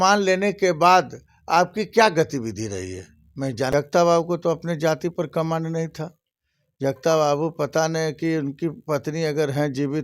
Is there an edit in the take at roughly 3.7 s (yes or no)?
yes